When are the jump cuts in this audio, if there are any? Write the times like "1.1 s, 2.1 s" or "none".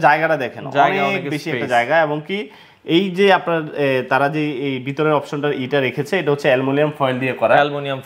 none